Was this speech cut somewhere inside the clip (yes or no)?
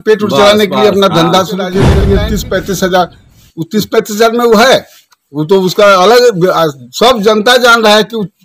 yes